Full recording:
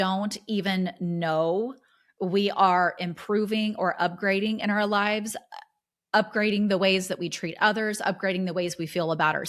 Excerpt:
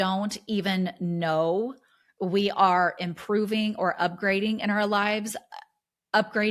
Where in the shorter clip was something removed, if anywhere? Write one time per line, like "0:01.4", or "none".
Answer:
none